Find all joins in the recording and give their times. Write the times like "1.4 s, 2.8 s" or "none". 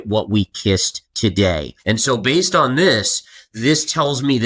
1.0 s, 1.7 s